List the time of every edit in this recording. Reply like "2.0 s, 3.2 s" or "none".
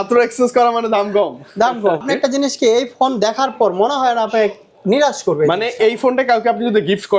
2.0 s